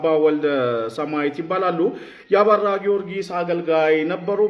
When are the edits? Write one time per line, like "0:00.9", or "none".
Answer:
none